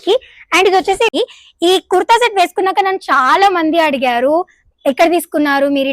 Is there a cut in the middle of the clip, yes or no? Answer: yes